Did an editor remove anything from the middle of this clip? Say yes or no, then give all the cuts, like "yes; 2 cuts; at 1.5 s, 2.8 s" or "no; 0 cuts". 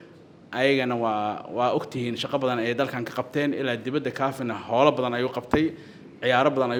no; 0 cuts